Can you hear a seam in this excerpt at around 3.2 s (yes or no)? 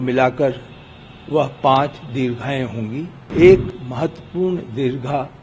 yes